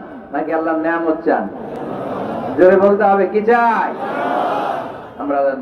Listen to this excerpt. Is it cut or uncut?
uncut